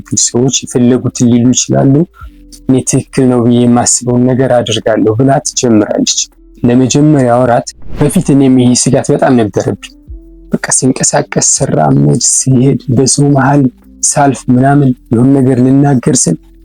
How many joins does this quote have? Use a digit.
1